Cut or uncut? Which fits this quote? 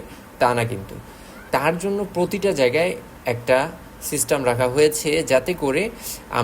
cut